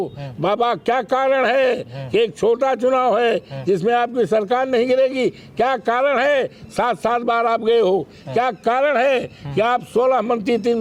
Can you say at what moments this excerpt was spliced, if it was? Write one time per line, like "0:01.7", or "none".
none